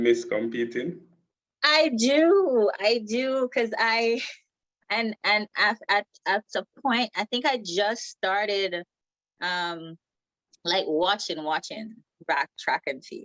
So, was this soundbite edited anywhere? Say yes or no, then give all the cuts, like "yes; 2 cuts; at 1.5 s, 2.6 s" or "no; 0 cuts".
no; 0 cuts